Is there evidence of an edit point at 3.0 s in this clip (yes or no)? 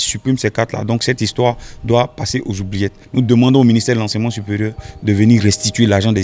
yes